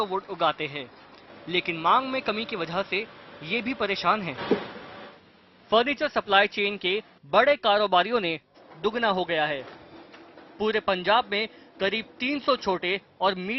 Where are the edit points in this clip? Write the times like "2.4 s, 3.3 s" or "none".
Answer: none